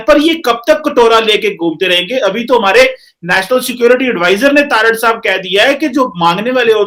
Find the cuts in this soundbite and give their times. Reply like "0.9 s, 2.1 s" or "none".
none